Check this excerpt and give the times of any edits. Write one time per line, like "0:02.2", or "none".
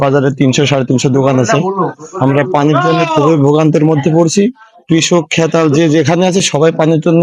none